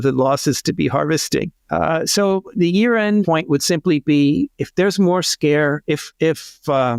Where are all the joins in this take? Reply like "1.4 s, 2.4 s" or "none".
1.6 s, 3.3 s, 6.1 s